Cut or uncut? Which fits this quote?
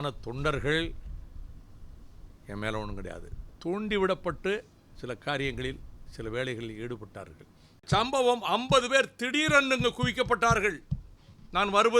cut